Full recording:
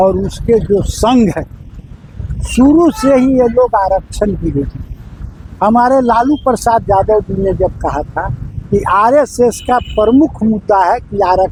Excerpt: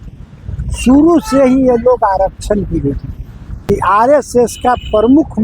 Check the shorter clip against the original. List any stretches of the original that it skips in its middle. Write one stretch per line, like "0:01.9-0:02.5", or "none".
0:05.2-0:08.5